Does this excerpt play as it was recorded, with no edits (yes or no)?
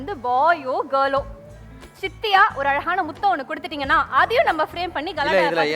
yes